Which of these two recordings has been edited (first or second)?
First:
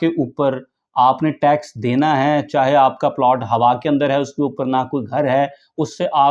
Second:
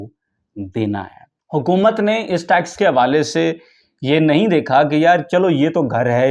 second